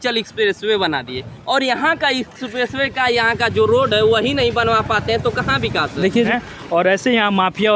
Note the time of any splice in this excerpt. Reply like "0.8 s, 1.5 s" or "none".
6.3 s

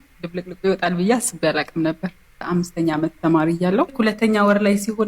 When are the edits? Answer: 3.9 s

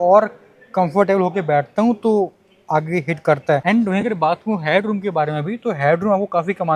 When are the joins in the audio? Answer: 3.6 s

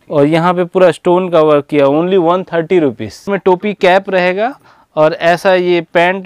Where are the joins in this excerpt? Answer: 3.3 s

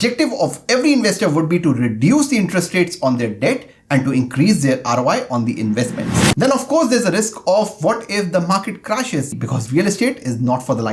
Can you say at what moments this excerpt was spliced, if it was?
6.2 s, 9.3 s

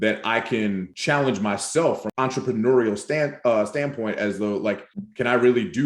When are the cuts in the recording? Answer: 0.9 s, 2.0 s, 5.0 s

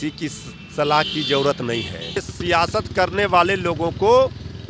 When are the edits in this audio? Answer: 2.3 s

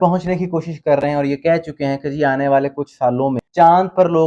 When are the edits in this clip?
none

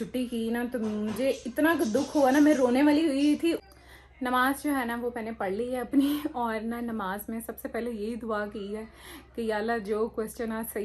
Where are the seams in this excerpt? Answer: 3.6 s

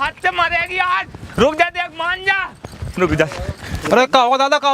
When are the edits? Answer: 3.7 s

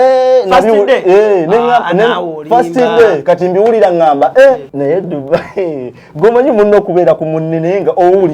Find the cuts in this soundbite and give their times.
4.7 s

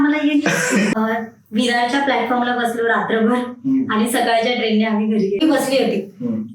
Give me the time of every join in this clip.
0.9 s, 5.4 s

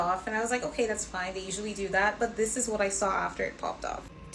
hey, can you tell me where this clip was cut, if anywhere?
none

